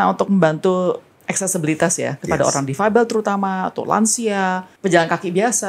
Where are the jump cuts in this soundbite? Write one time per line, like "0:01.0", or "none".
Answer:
0:01.1
0:04.7